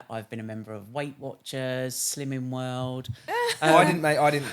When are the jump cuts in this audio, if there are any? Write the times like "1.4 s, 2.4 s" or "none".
3.2 s